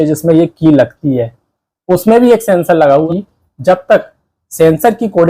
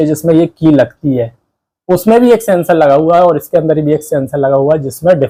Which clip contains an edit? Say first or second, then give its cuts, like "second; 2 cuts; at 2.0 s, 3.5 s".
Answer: first; 1 cut; at 3.1 s